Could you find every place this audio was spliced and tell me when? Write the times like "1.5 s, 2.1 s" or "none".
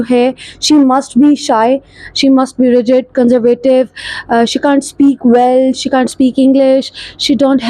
none